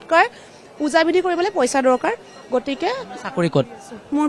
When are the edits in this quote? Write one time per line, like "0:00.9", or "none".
none